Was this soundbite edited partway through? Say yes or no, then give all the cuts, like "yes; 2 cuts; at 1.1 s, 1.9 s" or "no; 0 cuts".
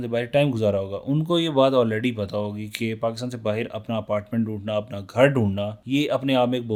no; 0 cuts